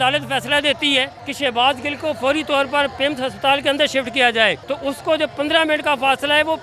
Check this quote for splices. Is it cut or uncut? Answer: cut